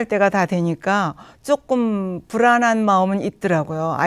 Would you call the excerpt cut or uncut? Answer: uncut